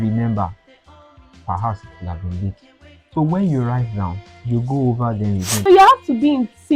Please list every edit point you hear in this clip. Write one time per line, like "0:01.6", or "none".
0:05.7